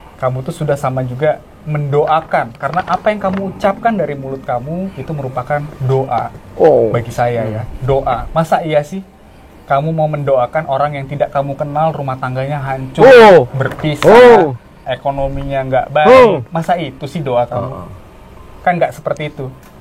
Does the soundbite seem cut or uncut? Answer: uncut